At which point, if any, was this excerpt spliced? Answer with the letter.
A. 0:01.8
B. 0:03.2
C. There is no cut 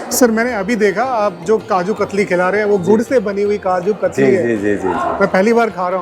C